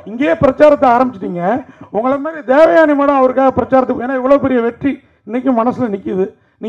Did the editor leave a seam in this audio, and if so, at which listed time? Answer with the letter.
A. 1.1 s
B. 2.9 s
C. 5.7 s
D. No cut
D